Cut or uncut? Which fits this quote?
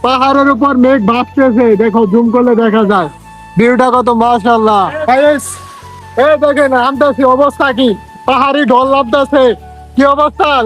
cut